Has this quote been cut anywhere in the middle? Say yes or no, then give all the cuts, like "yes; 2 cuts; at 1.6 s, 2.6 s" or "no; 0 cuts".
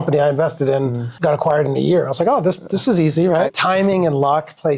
yes; 2 cuts; at 1.1 s, 3.5 s